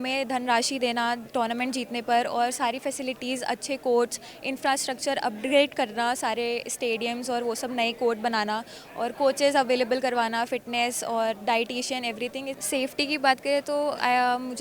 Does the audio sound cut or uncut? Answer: cut